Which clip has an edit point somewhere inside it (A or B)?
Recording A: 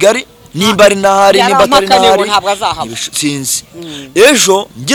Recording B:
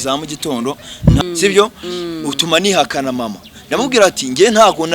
B